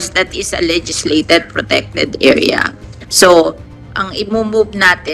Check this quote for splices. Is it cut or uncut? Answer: uncut